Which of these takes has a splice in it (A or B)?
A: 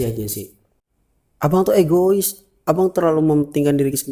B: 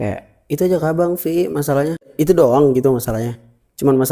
A